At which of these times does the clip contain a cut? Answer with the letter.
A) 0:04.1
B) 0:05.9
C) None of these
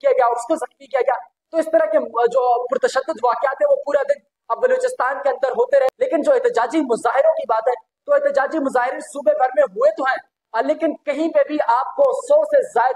B